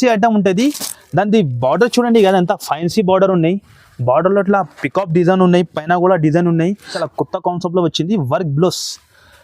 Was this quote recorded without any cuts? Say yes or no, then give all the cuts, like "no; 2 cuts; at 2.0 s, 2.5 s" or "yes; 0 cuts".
no; 1 cut; at 7.0 s